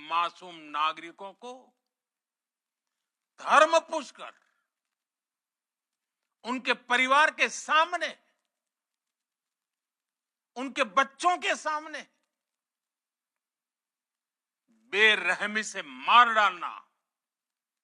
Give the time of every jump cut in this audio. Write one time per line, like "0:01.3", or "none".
none